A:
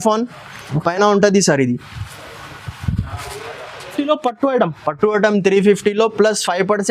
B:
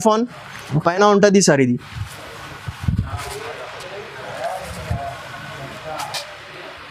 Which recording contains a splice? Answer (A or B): A